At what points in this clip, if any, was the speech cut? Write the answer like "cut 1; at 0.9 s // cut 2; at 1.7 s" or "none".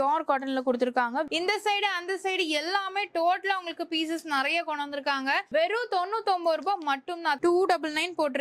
cut 1; at 1.3 s // cut 2; at 7.4 s